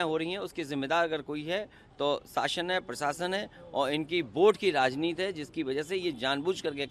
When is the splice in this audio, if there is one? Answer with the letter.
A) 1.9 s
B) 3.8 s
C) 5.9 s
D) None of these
D